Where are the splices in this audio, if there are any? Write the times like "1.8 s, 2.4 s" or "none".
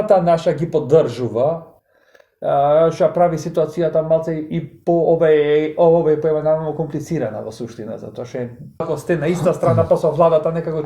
8.9 s